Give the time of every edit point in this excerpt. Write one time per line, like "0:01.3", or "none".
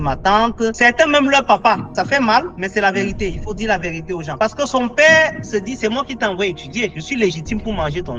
none